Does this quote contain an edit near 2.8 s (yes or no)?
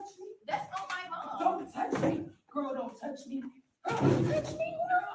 no